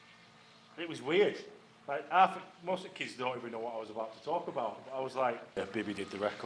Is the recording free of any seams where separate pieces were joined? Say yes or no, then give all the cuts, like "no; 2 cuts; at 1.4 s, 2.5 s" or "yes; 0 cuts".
no; 1 cut; at 5.6 s